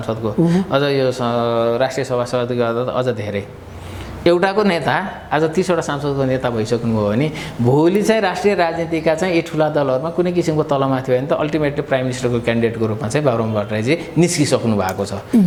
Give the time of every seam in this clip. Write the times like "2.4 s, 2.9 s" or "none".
none